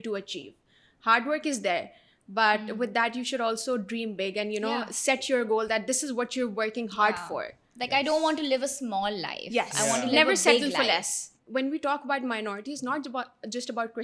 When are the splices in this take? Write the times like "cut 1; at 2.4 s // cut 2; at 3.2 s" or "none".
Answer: cut 1; at 11.3 s